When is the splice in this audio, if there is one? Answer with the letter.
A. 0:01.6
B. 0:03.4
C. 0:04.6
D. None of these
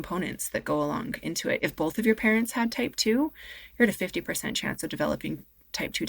A